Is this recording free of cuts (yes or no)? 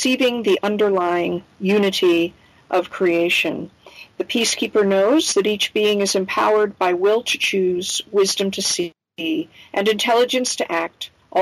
yes